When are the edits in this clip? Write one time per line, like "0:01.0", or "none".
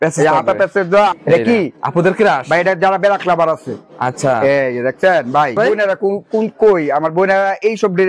0:01.2
0:05.5